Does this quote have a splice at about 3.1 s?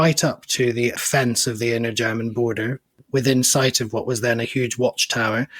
no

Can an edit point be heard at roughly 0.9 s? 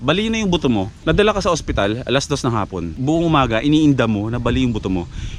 yes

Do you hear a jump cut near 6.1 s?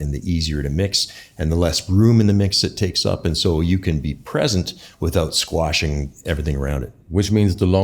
yes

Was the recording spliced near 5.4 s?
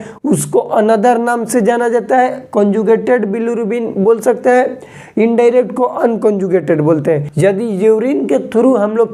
no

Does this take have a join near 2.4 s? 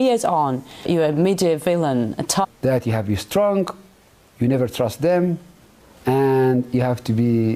no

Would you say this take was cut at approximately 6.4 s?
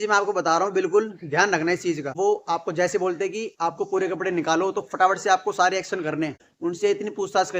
yes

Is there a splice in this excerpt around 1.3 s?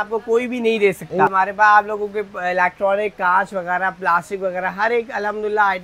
yes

